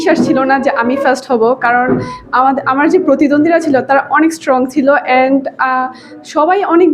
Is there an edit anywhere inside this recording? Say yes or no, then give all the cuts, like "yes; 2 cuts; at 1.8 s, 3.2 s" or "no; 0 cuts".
no; 0 cuts